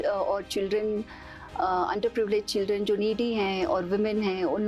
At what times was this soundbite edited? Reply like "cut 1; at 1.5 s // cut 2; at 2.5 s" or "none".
none